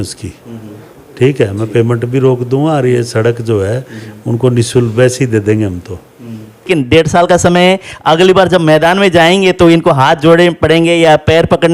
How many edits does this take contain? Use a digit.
1